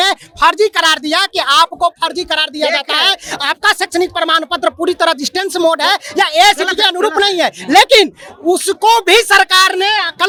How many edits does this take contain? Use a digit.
0